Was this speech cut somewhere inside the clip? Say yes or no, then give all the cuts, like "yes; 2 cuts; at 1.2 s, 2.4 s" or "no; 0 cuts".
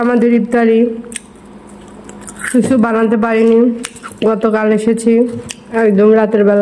no; 0 cuts